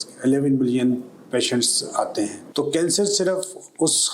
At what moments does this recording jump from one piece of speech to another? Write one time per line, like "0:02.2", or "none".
0:02.4